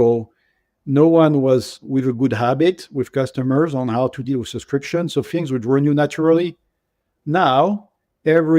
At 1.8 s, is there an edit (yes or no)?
yes